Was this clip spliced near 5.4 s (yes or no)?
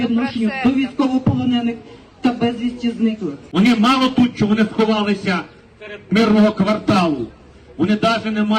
no